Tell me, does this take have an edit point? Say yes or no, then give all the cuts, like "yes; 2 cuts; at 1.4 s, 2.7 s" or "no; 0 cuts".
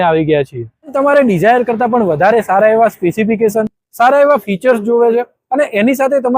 yes; 1 cut; at 0.9 s